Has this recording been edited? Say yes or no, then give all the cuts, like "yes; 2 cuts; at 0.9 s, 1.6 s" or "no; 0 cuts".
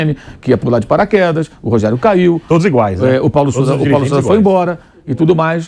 no; 0 cuts